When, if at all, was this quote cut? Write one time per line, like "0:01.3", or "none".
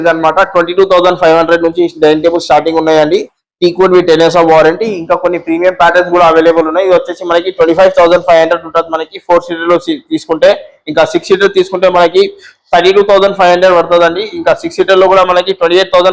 none